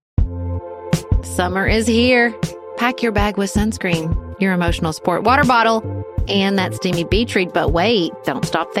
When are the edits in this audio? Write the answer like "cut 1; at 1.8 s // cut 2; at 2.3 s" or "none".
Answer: cut 1; at 1.0 s